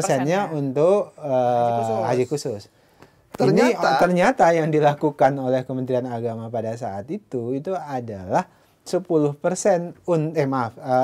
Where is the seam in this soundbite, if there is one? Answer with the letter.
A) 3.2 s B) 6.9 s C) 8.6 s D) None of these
D